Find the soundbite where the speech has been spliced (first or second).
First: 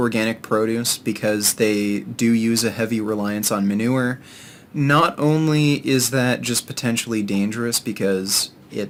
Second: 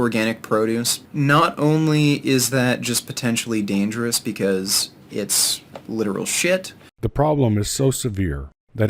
second